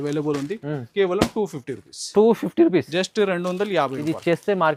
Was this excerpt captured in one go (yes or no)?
yes